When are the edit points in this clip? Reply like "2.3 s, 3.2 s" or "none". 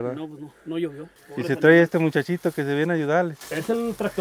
none